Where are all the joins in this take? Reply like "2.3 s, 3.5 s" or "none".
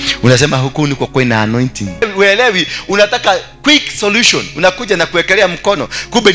2.0 s

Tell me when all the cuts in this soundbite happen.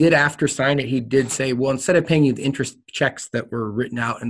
none

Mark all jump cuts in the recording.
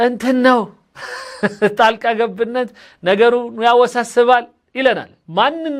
none

